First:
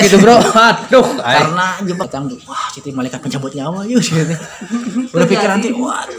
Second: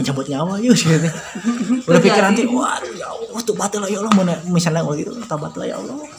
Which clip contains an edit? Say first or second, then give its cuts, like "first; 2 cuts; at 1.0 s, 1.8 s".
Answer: first; 1 cut; at 2.1 s